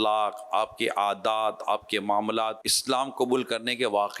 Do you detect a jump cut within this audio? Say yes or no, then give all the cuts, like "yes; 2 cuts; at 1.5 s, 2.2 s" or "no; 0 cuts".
yes; 1 cut; at 2.7 s